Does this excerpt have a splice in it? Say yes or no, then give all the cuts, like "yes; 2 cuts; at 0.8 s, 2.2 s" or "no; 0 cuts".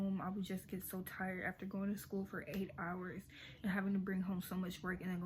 no; 0 cuts